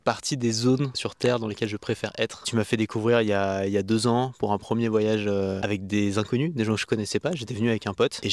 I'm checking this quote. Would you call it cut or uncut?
cut